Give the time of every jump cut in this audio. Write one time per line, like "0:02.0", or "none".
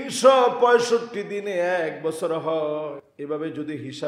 0:03.1